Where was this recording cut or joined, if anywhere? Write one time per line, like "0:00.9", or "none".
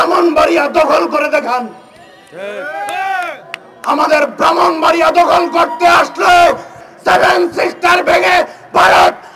0:06.8